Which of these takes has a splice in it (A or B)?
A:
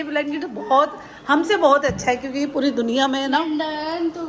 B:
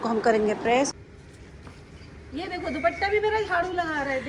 B